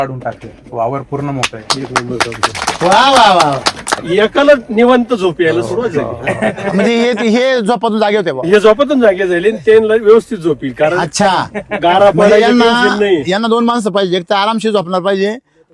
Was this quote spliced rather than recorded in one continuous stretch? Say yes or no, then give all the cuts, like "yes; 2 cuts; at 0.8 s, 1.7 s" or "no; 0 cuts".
yes; 1 cut; at 3.9 s